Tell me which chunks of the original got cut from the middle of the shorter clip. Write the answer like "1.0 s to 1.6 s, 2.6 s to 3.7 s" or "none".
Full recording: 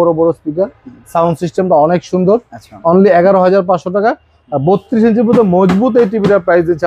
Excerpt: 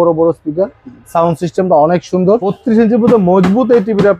2.5 s to 4.8 s